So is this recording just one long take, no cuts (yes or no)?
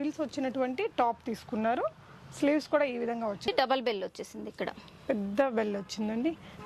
no